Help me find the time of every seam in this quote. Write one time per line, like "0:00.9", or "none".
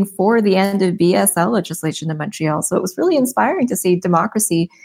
none